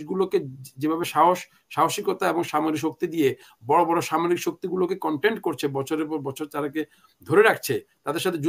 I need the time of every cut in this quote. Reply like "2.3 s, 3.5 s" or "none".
none